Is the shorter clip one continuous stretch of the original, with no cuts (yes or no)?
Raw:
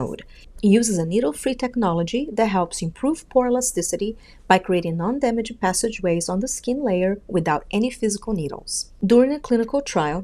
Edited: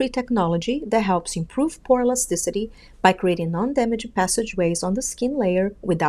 yes